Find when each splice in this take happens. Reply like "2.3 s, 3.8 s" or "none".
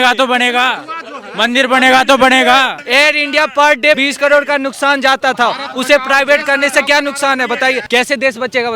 2.8 s, 4.0 s, 7.8 s

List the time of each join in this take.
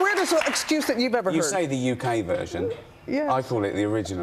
none

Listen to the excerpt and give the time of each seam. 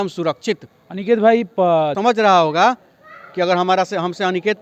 1.9 s

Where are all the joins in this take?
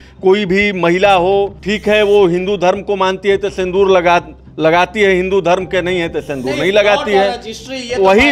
1.6 s

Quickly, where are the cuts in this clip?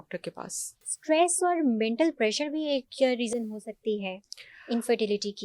0.9 s

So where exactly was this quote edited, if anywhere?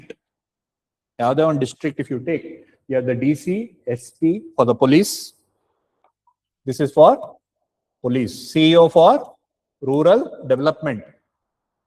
none

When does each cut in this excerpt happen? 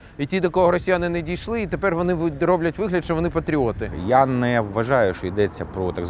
3.9 s

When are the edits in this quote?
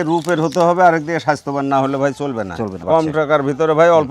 2.7 s

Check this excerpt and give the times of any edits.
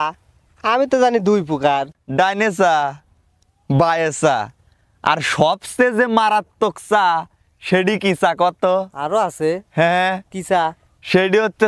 2.0 s

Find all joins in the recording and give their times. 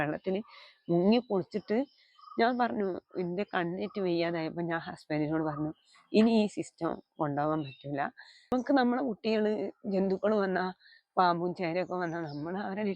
8.5 s

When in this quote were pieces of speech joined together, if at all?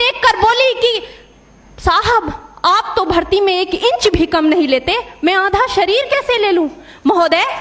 none

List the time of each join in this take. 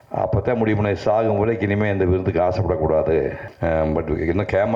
3.4 s

